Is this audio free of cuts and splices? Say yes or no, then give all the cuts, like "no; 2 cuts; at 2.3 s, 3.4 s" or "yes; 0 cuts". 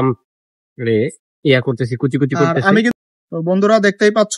no; 1 cut; at 2.9 s